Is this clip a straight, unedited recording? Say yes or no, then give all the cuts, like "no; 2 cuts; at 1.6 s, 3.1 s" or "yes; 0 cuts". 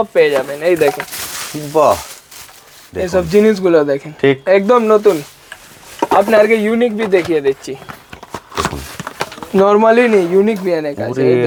yes; 0 cuts